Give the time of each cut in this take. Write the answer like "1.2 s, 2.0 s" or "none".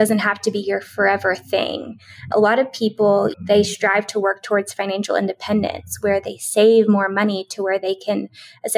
2.3 s, 3.3 s